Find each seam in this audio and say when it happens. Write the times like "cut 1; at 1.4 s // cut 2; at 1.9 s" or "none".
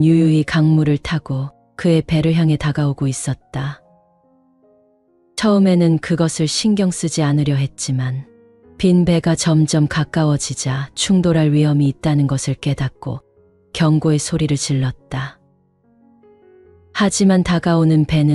none